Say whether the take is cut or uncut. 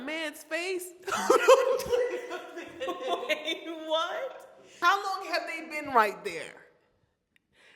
cut